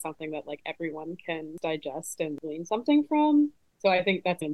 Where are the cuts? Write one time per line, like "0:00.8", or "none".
0:01.5
0:02.4